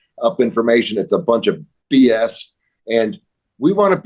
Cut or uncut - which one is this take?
cut